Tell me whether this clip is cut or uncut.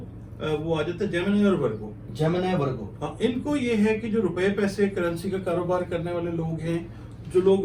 uncut